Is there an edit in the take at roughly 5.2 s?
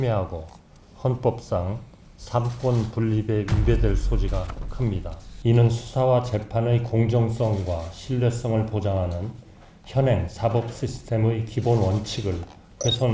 yes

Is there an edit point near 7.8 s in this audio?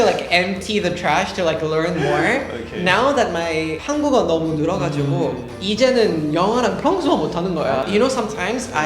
yes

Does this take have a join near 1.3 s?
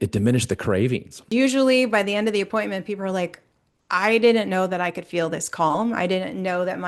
yes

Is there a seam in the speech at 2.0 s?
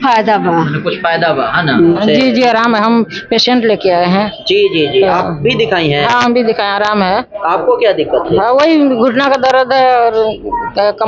yes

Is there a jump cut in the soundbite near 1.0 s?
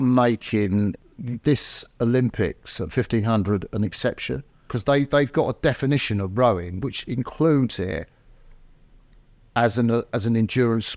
yes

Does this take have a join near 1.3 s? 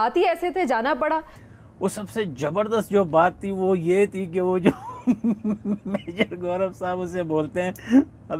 yes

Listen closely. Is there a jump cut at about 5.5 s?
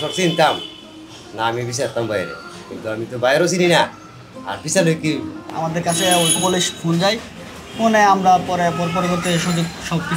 yes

